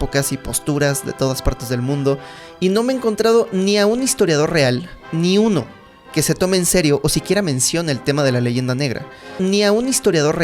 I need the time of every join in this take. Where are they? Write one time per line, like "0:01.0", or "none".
0:09.4